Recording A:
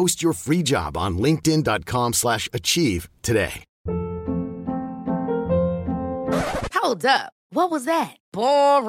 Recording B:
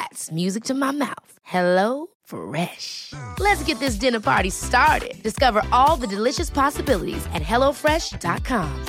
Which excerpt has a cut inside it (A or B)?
A